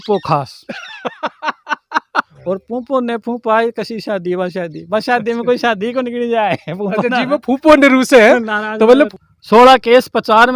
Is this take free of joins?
no; 2 cuts; at 2.3 s, 9.1 s

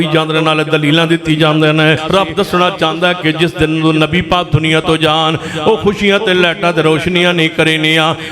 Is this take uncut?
no; 1 cut; at 2.0 s

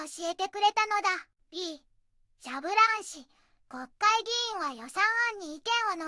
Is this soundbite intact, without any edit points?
no; 1 cut; at 1.3 s

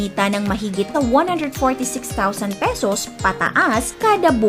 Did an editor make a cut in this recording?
yes; 1 cut; at 0.9 s

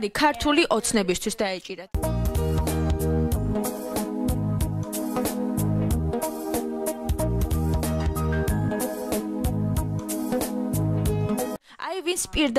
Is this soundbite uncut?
yes; 0 cuts

